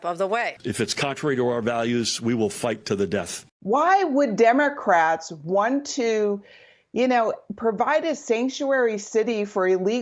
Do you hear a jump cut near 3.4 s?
yes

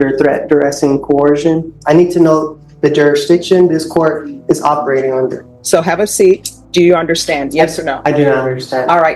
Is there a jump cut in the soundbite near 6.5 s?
yes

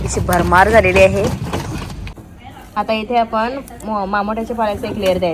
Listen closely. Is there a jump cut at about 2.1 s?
yes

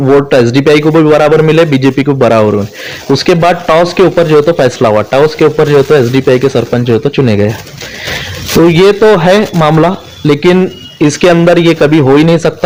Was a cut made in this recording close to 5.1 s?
no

